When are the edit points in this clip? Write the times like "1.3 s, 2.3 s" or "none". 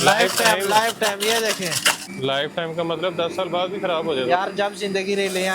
2.1 s